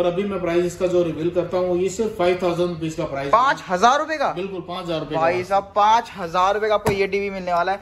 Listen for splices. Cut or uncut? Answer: uncut